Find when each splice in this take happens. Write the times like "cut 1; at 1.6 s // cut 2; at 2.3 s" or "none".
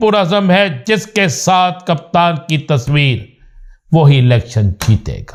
none